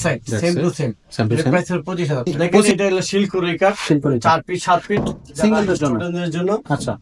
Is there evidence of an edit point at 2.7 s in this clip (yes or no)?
yes